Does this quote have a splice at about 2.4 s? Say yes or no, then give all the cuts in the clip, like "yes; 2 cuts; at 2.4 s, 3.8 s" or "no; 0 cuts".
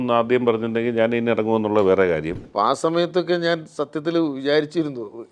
yes; 1 cut; at 2.4 s